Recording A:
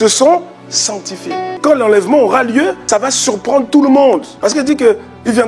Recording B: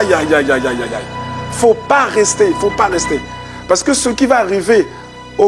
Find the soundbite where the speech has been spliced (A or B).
A